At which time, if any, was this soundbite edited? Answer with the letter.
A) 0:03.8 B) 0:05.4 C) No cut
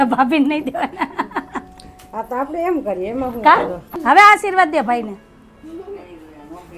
A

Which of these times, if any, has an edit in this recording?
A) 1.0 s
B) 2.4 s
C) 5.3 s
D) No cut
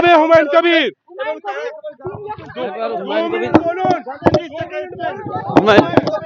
D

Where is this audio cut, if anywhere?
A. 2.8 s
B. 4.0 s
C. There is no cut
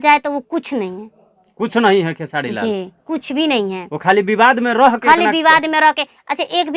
C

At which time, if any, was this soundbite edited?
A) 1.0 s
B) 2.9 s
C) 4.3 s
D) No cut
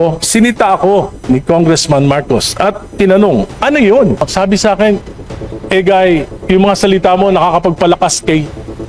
C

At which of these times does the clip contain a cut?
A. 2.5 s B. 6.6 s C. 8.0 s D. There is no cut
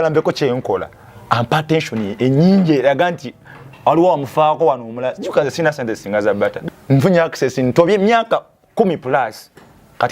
B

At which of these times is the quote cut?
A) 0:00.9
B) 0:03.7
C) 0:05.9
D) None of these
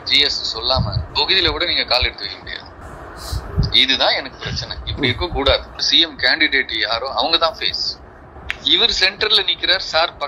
C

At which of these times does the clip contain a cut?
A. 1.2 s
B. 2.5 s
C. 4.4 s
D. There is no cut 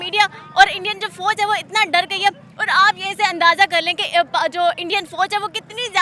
D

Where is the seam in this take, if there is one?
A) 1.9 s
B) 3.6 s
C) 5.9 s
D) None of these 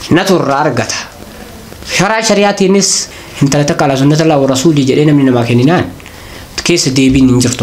B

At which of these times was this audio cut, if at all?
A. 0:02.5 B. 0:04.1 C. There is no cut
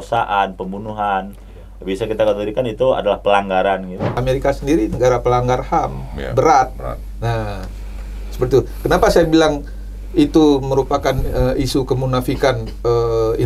B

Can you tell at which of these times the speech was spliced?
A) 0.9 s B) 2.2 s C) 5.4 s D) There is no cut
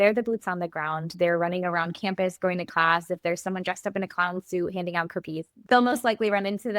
C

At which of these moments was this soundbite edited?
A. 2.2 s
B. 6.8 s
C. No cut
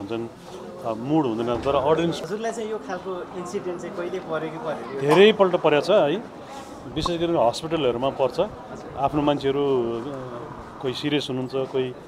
A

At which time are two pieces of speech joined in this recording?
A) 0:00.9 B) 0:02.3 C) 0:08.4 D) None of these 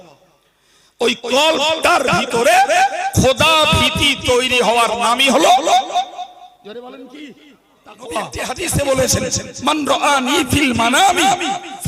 C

